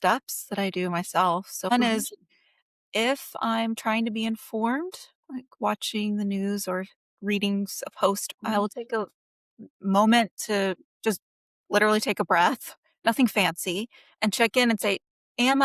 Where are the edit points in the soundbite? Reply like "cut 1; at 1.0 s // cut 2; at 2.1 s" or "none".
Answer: cut 1; at 1.7 s // cut 2; at 8.2 s